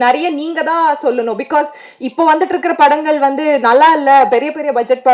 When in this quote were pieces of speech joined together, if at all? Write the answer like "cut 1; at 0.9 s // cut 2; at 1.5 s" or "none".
none